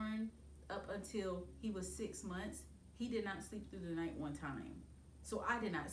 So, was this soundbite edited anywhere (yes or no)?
no